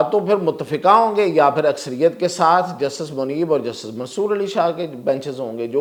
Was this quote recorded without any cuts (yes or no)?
yes